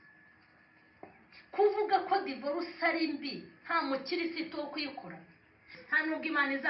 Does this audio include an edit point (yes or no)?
yes